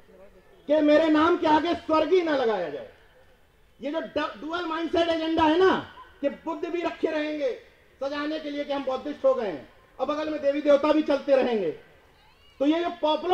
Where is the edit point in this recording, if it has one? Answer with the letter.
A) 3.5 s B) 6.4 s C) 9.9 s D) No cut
D